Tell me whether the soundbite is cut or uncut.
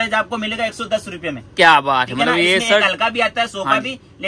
uncut